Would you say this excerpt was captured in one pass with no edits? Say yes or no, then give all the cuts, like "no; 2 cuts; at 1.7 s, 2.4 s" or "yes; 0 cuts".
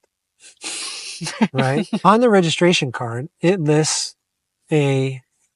no; 1 cut; at 2.0 s